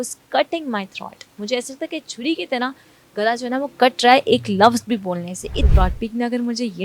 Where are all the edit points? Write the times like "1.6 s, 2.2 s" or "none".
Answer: 5.6 s